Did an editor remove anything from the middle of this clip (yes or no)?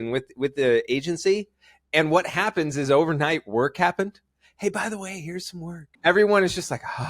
yes